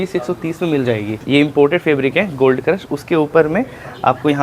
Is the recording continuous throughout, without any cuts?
no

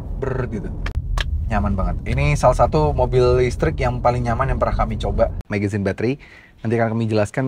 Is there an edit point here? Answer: yes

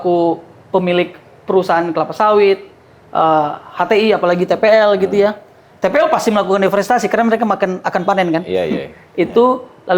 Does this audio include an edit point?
no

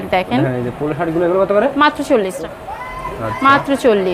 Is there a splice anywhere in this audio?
yes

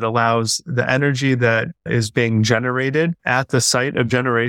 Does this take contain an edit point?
yes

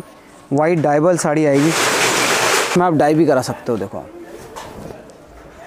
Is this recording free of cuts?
yes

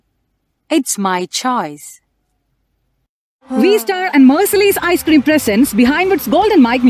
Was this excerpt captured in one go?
yes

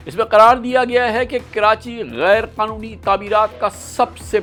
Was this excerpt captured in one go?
yes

